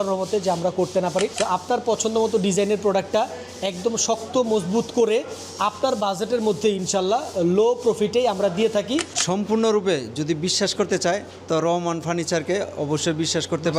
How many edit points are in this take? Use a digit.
2